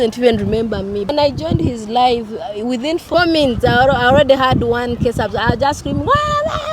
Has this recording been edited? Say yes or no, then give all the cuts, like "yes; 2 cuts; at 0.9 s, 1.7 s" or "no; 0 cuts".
yes; 2 cuts; at 1.1 s, 3.0 s